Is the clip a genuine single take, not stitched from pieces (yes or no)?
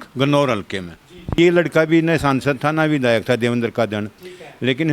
no